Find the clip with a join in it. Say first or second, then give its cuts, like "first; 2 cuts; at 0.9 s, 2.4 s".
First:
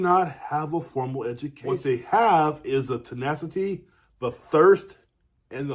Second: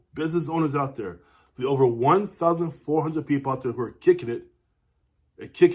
first; 1 cut; at 1.8 s